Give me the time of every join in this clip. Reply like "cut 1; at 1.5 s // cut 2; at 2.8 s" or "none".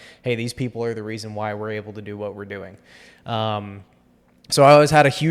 none